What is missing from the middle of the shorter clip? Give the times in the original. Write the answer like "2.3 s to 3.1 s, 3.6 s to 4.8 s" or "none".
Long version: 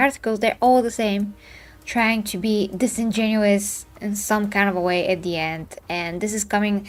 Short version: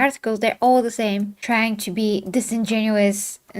1.4 s to 1.8 s